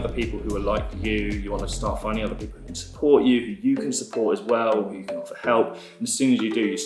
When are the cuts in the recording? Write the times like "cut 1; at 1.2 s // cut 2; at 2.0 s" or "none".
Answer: none